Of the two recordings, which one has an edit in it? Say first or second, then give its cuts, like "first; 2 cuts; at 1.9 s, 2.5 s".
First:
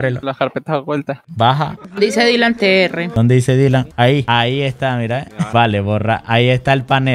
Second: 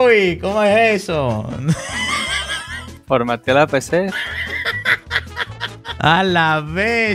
second; 1 cut; at 5.9 s